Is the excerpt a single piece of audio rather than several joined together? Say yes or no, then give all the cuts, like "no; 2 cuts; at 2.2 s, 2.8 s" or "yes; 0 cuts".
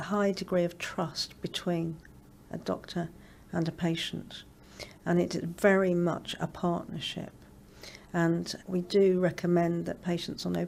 yes; 0 cuts